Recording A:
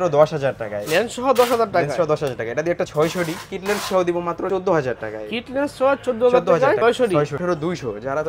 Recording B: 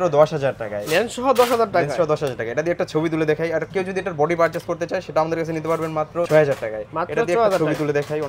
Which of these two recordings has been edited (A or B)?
A